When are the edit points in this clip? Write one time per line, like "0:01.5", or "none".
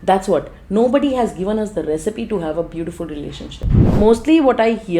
0:03.9